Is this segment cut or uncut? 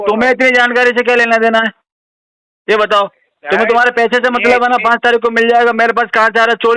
uncut